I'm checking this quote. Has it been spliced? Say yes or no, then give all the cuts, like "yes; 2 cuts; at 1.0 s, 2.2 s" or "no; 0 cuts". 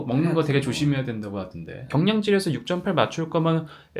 yes; 1 cut; at 1.8 s